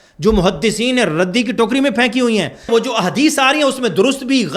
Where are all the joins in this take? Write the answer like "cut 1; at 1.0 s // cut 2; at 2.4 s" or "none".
cut 1; at 2.7 s